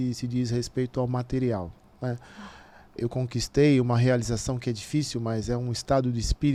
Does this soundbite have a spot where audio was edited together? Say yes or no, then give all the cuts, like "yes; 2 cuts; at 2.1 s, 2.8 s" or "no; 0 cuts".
no; 0 cuts